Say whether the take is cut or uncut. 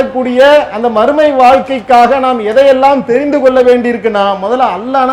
uncut